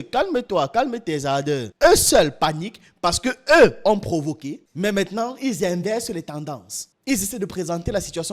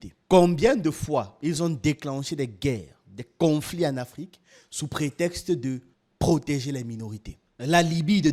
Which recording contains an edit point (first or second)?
first